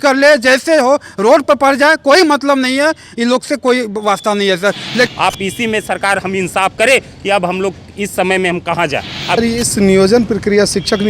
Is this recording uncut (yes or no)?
no